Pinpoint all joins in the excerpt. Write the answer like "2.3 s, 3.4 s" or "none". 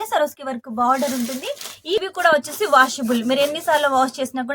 2.0 s